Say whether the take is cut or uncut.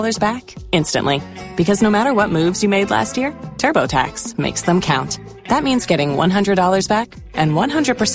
uncut